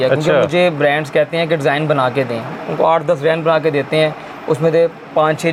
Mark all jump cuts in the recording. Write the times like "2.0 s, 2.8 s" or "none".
none